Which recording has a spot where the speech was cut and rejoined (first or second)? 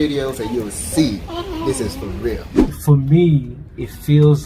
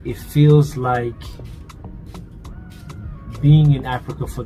first